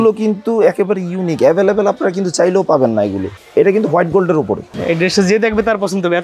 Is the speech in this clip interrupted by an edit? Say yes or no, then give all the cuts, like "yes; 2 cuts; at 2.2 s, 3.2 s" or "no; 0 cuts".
yes; 1 cut; at 3.3 s